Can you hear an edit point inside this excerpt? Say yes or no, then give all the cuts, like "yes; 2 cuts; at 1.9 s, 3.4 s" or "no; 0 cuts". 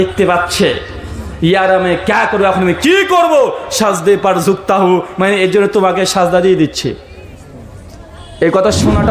no; 0 cuts